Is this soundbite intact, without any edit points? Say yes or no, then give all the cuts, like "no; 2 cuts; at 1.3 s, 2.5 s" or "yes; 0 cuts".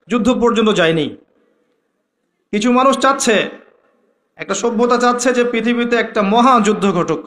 yes; 0 cuts